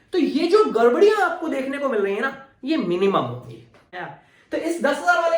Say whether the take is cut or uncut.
cut